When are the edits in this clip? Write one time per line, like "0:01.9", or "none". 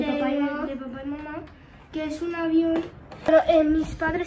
0:03.3